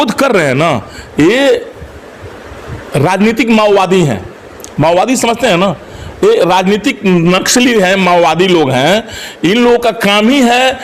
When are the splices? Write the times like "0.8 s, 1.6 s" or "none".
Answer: none